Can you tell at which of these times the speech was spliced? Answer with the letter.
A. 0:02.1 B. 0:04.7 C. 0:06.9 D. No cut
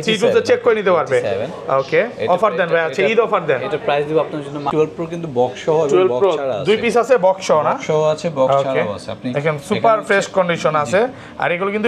B